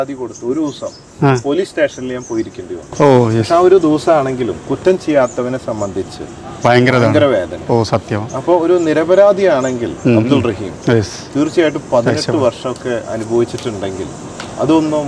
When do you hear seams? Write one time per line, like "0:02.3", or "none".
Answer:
none